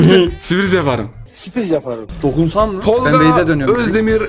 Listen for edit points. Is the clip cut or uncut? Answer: cut